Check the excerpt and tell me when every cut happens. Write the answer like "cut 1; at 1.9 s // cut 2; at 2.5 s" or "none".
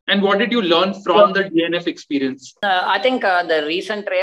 cut 1; at 2.5 s